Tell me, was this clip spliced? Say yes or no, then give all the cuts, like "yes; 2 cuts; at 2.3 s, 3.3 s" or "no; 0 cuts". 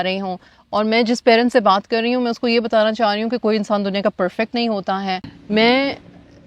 yes; 1 cut; at 5.3 s